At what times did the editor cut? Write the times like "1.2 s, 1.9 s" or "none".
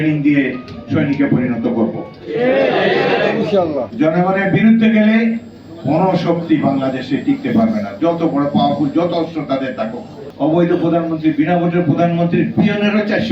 3.9 s, 10.2 s